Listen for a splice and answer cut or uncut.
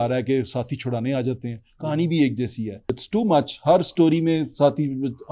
cut